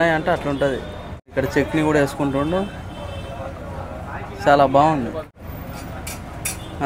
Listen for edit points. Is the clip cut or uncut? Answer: cut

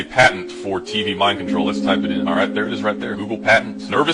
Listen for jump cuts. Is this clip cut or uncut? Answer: uncut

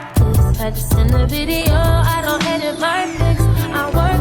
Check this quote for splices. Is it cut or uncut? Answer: uncut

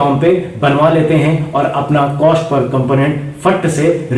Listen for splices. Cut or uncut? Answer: uncut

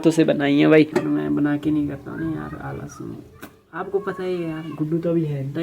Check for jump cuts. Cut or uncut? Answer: cut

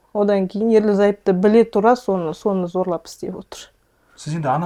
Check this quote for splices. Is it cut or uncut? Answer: uncut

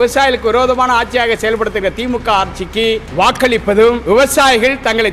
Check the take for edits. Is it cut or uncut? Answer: cut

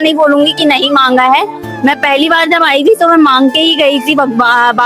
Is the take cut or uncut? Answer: uncut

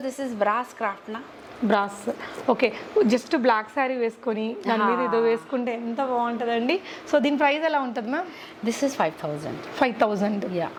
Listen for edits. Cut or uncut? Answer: uncut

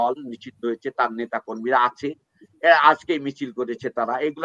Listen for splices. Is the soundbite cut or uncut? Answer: uncut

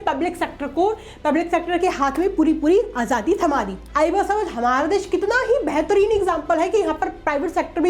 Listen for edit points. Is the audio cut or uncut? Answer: cut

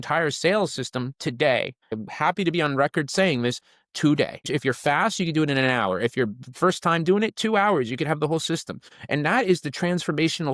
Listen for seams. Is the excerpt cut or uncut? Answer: cut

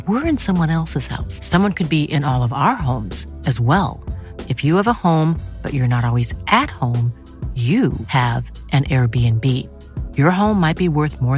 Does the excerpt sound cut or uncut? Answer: uncut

